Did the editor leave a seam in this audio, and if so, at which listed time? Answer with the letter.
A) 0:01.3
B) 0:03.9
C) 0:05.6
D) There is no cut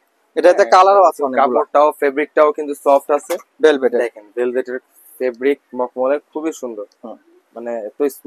D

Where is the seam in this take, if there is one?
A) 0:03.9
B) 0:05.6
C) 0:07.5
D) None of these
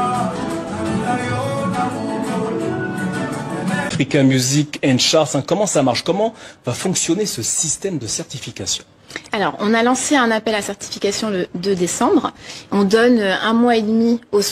A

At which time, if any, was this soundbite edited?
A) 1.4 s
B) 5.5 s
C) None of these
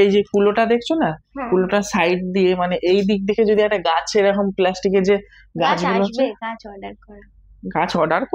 C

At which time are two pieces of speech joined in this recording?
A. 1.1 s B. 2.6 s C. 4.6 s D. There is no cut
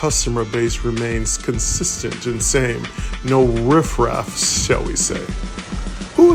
D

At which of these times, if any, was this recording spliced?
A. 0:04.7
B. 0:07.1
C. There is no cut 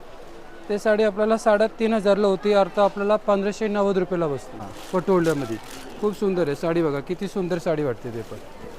A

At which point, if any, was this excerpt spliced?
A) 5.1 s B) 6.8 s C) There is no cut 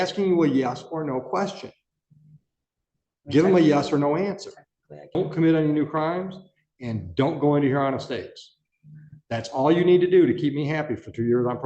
A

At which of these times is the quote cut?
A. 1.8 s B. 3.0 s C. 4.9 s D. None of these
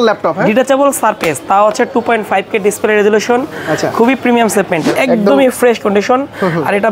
C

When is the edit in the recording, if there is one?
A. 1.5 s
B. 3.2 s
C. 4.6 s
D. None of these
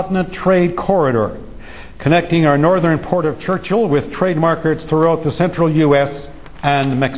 A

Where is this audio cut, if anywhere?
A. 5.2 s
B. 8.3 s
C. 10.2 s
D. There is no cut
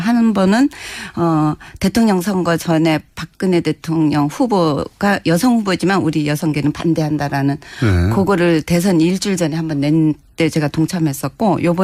A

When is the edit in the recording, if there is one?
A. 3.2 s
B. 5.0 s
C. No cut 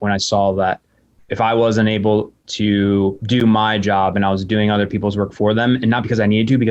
A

